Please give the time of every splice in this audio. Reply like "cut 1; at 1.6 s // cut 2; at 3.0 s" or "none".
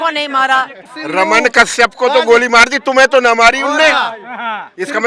cut 1; at 0.9 s